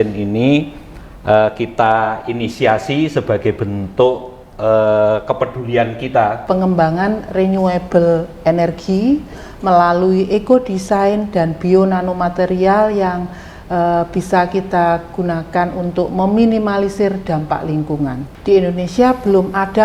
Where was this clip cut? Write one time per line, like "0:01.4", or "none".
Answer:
0:06.4
0:18.3